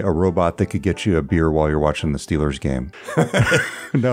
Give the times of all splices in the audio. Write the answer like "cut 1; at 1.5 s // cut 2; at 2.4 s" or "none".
cut 1; at 3.0 s

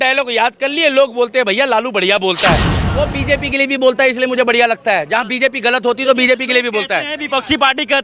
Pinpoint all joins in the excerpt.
cut 1; at 2.7 s

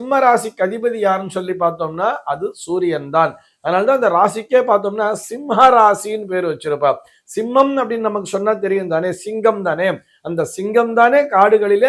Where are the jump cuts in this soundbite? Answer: none

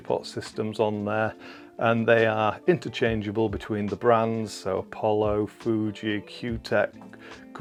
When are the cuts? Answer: none

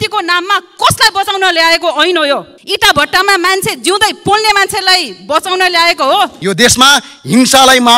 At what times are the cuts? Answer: cut 1; at 2.6 s // cut 2; at 6.4 s

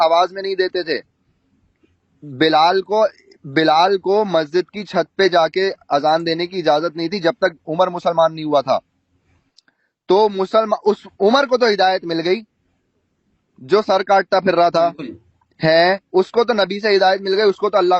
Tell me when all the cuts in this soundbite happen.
none

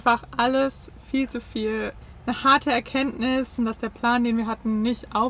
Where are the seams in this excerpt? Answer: cut 1; at 2.0 s // cut 2; at 3.5 s

